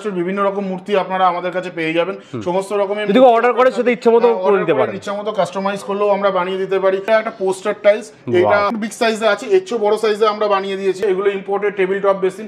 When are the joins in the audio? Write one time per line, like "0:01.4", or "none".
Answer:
0:07.0
0:08.7
0:11.0